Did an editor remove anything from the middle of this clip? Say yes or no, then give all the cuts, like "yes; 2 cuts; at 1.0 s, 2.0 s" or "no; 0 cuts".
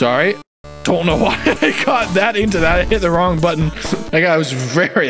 yes; 1 cut; at 4.1 s